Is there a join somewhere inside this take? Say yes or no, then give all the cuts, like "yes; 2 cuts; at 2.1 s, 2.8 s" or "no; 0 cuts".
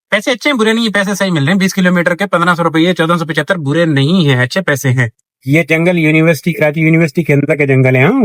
no; 0 cuts